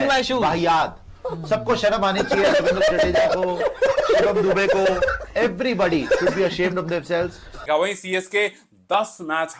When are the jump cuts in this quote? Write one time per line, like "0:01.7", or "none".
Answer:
0:07.4